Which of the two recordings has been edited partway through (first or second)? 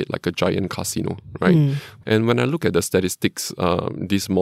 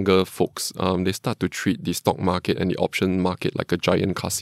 first